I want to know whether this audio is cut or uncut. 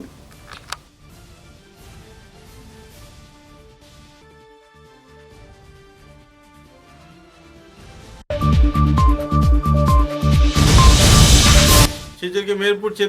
cut